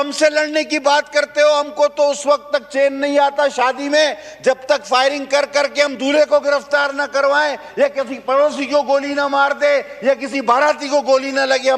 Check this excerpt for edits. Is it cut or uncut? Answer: uncut